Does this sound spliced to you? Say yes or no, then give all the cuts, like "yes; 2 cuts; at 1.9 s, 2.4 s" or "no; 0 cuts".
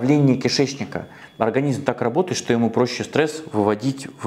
yes; 1 cut; at 1.2 s